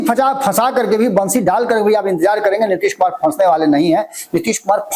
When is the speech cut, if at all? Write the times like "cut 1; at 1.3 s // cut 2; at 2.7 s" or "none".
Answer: none